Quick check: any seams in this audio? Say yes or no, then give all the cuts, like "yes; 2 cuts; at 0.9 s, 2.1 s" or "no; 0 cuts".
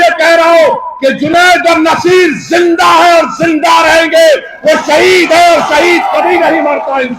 no; 0 cuts